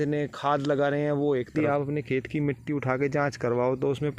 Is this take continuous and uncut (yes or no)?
no